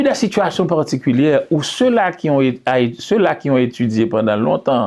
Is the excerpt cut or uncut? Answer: uncut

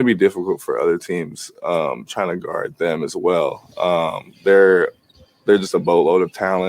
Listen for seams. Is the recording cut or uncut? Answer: uncut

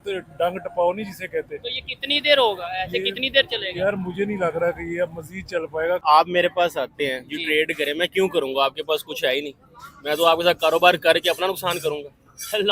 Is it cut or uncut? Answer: cut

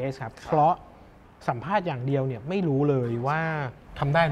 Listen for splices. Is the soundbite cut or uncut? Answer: uncut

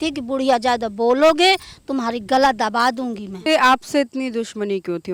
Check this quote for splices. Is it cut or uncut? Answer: cut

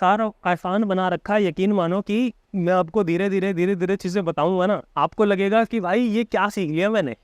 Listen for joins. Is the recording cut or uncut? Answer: cut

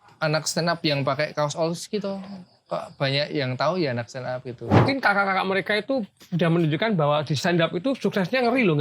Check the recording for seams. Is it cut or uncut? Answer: cut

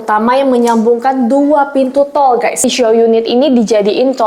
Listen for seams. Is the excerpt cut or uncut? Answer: cut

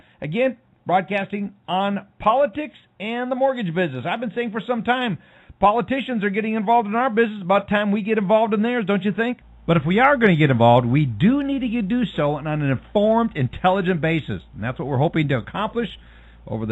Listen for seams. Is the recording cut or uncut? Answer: uncut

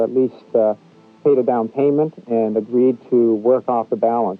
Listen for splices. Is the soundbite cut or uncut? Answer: uncut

